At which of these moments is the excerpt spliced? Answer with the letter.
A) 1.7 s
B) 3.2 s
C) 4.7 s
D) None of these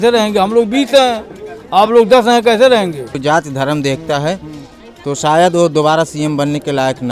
B